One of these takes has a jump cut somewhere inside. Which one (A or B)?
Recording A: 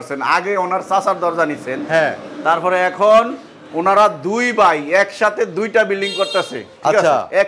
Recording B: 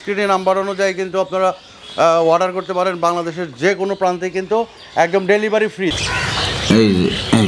B